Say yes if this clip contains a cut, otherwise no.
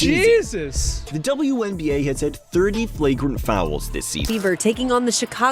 yes